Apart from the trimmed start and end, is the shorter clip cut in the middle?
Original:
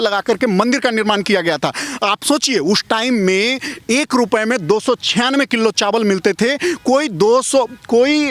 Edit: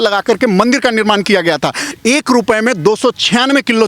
yes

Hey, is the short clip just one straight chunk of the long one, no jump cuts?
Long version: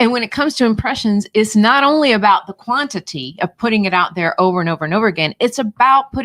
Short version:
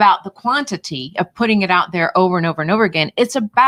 yes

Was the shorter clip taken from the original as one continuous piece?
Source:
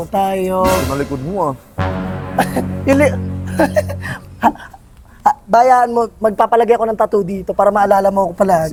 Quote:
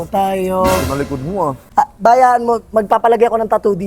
no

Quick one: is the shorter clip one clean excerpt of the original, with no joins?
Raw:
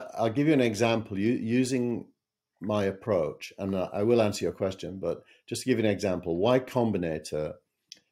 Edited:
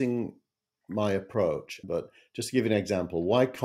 no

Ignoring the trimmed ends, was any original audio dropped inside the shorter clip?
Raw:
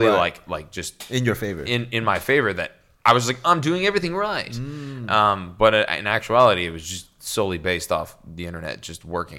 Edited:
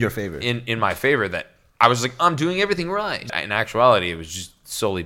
yes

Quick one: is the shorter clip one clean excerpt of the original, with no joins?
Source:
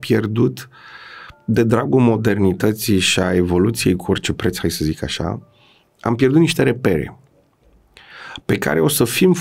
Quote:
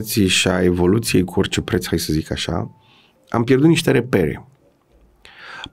yes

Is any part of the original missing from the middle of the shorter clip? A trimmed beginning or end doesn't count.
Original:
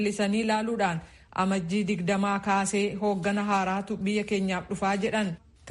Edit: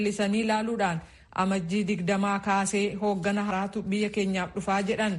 yes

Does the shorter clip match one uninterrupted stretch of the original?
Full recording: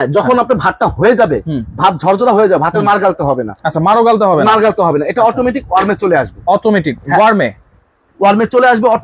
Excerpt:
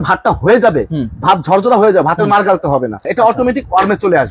no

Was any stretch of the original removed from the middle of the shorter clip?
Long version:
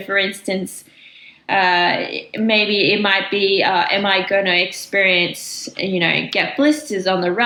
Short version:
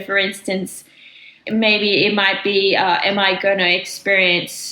yes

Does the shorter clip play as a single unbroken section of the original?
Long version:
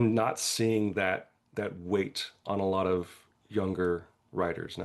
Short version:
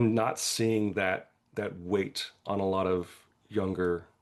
yes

